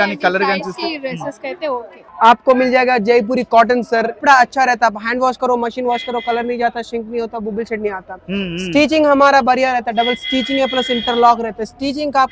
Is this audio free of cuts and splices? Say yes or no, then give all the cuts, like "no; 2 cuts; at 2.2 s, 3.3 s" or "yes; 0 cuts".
no; 2 cuts; at 2.0 s, 4.2 s